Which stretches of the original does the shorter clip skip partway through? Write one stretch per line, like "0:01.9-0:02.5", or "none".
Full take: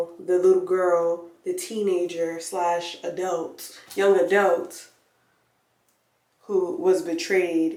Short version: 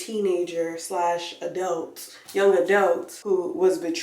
0:04.7-0:06.4